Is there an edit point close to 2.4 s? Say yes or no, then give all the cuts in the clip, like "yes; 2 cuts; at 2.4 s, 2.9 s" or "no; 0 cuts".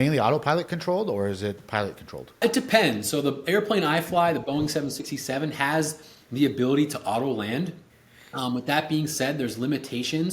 yes; 1 cut; at 2.4 s